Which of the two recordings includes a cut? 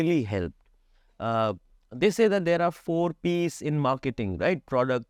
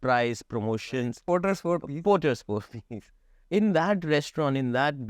second; 1 cut; at 1.2 s

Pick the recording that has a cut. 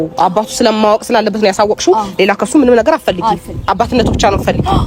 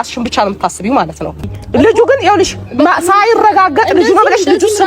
second; 1 cut; at 1.4 s

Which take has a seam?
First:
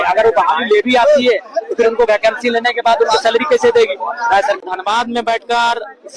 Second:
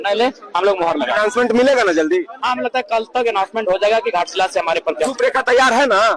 first; 1 cut; at 4.6 s

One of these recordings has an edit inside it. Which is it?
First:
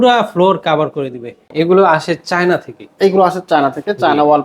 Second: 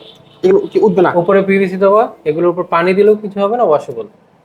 first; 1 cut; at 1.4 s

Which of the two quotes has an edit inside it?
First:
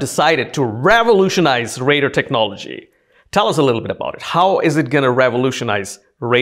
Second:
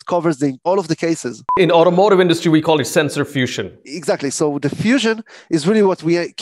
second; 2 cuts; at 0.9 s, 3.8 s

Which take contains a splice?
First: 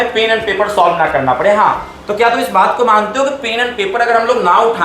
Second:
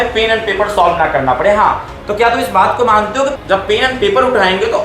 second; 1 cut; at 3.4 s

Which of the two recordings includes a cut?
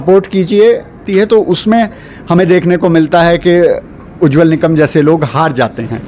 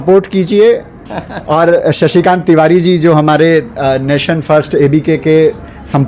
first; 1 cut; at 1.0 s

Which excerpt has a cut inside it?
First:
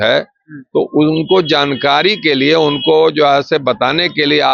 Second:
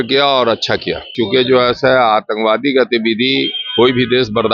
second; 1 cut; at 1.1 s

